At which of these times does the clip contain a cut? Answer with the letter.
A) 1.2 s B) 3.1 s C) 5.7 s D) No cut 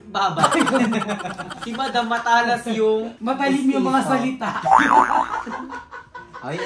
B